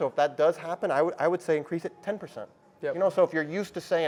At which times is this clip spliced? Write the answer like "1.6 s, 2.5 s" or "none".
none